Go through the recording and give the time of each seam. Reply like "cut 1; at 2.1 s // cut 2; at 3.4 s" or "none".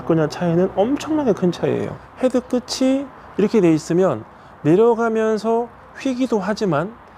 cut 1; at 2.0 s

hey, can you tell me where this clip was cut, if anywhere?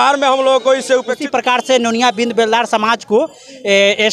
cut 1; at 1.2 s

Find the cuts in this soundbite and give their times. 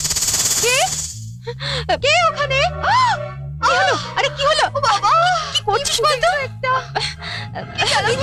none

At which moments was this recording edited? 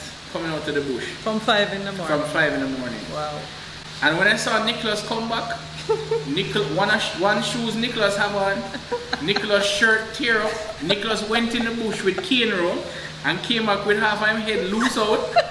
none

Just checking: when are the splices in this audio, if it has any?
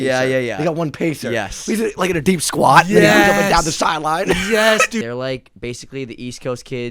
cut 1; at 5.0 s

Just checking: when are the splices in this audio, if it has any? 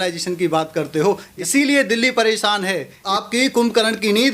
cut 1; at 1.4 s // cut 2; at 3.0 s

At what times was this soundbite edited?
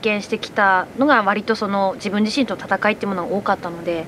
none

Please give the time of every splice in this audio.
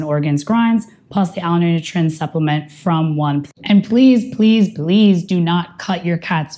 cut 1; at 3.5 s

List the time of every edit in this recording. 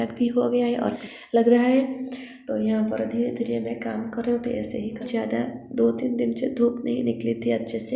cut 1; at 1.0 s // cut 2; at 5.0 s

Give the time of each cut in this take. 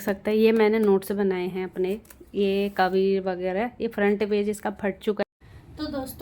cut 1; at 5.2 s

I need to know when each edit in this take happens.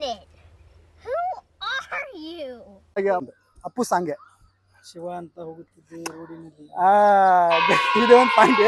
cut 1; at 3.2 s

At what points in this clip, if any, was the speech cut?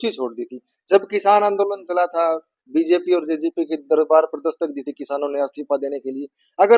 none

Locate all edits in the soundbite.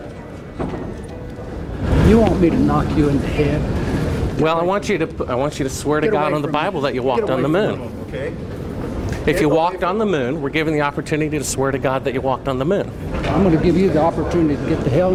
none

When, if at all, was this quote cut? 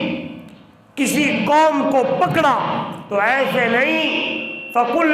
cut 1; at 3.0 s

